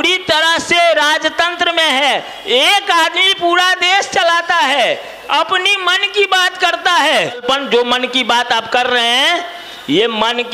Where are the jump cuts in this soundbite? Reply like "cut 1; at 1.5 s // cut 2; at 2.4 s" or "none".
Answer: cut 1; at 7.4 s